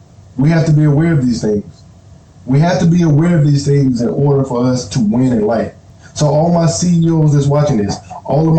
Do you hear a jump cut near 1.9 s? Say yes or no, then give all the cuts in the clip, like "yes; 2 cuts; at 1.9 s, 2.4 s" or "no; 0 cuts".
no; 1 cut; at 5.8 s